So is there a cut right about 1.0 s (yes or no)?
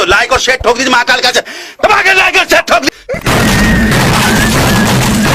no